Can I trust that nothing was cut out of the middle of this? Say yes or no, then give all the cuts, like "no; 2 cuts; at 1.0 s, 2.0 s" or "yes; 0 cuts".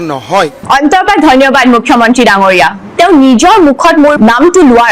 no; 2 cuts; at 2.8 s, 4.2 s